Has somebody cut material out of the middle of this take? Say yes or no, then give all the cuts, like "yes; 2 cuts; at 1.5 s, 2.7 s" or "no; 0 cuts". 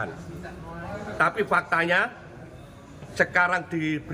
no; 0 cuts